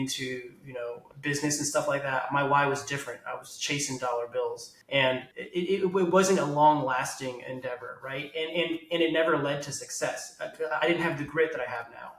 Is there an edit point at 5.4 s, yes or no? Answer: yes